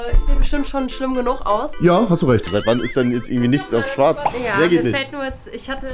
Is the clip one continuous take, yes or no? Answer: no